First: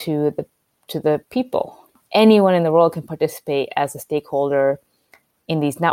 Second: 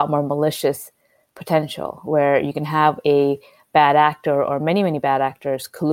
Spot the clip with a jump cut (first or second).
first